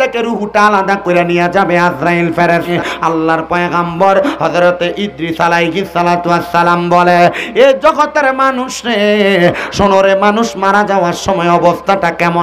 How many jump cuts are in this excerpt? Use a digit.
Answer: 1